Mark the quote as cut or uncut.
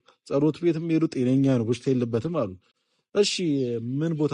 uncut